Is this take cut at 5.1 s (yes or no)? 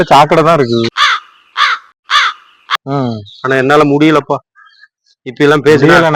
no